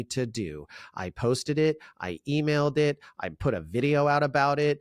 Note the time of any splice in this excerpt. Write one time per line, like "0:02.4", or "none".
none